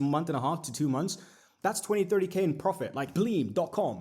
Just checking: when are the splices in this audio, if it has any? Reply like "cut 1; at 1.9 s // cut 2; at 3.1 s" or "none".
cut 1; at 3.1 s